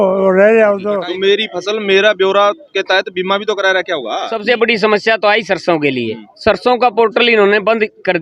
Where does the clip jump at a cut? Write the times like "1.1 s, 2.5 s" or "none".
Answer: 1.0 s, 4.3 s